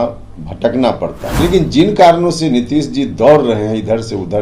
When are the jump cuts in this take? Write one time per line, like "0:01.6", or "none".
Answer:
0:01.2